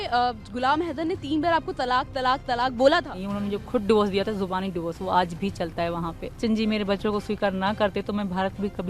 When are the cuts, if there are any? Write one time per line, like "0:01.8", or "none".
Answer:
0:03.2
0:06.4